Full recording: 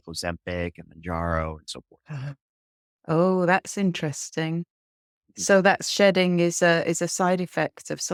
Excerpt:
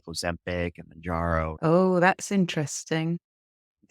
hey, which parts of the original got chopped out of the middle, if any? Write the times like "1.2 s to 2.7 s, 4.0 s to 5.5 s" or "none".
1.5 s to 3.0 s